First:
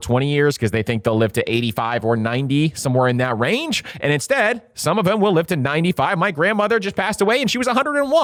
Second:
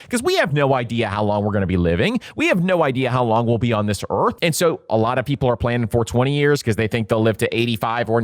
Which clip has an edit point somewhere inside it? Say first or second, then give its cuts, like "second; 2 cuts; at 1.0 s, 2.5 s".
second; 1 cut; at 4.4 s